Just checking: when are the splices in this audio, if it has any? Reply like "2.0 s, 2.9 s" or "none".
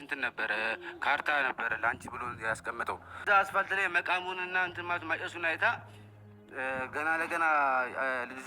3.2 s